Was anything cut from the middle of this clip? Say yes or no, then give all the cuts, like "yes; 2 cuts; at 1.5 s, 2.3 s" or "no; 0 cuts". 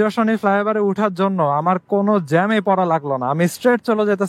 no; 0 cuts